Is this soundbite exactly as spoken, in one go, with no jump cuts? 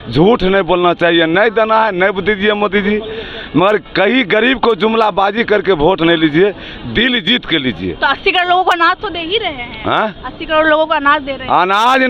yes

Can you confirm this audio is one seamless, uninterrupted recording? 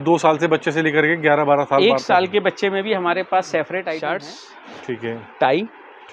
no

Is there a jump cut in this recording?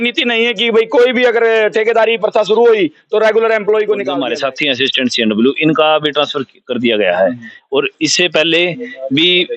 yes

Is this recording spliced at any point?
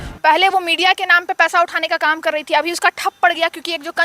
no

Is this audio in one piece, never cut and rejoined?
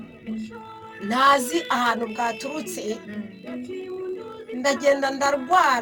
no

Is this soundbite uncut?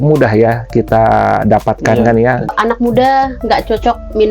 no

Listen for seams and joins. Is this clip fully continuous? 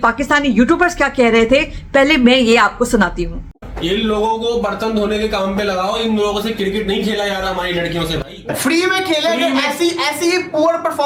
yes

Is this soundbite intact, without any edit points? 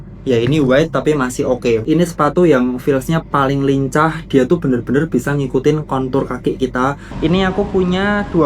no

